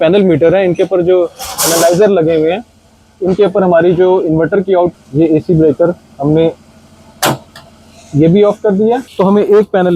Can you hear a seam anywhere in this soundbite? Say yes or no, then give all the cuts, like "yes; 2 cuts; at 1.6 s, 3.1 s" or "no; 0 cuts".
yes; 2 cuts; at 4.9 s, 9.1 s